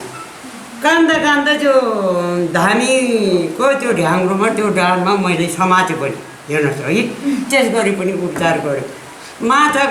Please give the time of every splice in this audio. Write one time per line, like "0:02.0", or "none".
none